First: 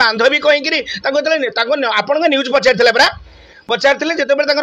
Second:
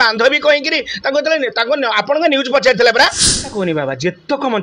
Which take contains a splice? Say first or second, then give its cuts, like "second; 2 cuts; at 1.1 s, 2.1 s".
second; 1 cut; at 3.4 s